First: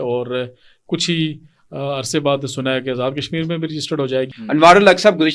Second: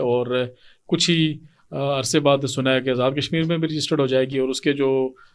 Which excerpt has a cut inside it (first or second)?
first